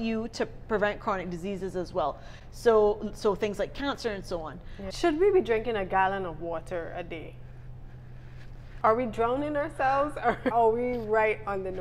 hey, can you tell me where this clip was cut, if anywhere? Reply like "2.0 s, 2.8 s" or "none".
4.8 s, 10.5 s